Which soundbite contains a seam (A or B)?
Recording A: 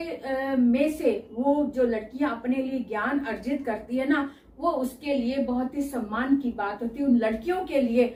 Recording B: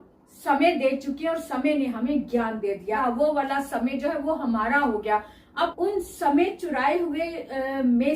B